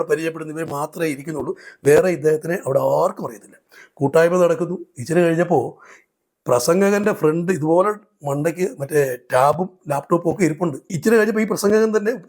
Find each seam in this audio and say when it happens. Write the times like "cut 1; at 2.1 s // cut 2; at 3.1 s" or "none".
cut 1; at 11.0 s